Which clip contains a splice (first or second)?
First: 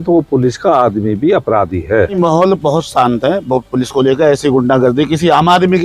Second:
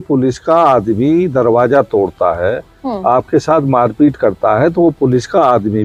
first